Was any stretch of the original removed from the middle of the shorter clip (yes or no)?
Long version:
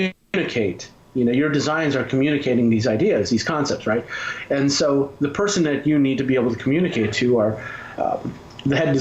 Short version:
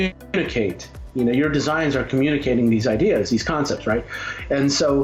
no